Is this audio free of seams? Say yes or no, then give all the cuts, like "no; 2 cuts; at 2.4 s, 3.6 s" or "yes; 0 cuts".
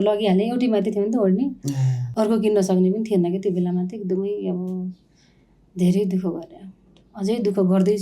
yes; 0 cuts